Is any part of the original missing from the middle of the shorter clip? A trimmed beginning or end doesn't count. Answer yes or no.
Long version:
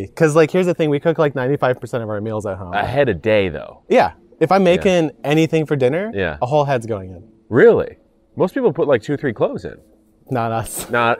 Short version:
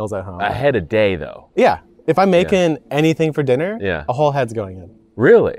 no